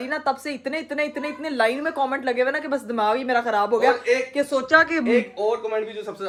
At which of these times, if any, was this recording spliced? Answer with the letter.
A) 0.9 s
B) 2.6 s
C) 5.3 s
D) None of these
D